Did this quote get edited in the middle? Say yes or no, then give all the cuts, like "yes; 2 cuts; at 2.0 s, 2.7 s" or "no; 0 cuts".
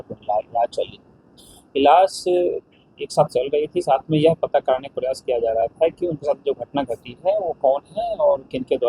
no; 0 cuts